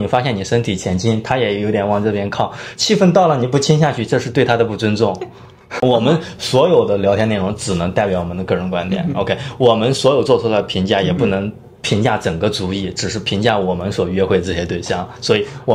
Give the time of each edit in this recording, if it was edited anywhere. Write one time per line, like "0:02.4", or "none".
0:05.8

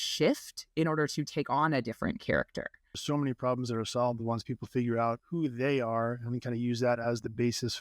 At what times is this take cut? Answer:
0:03.0
0:05.2

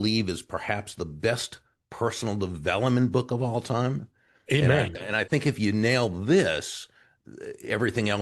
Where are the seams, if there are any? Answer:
0:04.9

